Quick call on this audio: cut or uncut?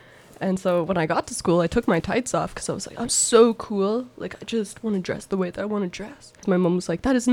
cut